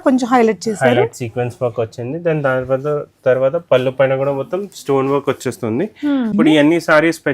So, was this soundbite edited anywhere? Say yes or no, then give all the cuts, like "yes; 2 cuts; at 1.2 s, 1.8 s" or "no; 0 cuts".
yes; 1 cut; at 6.3 s